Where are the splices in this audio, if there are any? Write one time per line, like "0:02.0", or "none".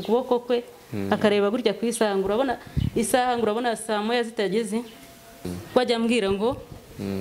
0:05.5